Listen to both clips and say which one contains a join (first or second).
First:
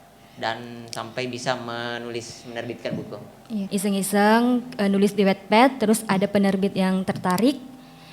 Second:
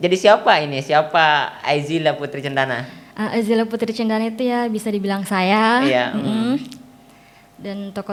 first